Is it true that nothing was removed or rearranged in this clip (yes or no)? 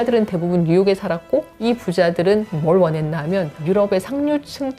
no